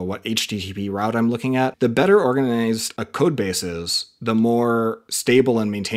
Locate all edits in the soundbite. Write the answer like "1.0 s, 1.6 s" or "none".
1.7 s, 2.9 s, 5.1 s